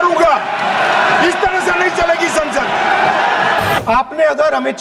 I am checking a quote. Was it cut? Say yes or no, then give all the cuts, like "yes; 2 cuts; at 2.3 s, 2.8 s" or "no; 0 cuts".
yes; 1 cut; at 3.8 s